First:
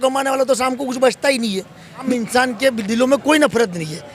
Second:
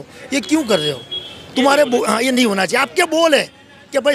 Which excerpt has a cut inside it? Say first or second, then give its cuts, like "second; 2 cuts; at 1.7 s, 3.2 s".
first; 1 cut; at 2.0 s